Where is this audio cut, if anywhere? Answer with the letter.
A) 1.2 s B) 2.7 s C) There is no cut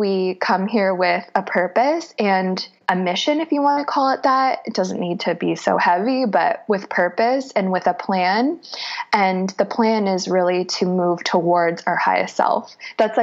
B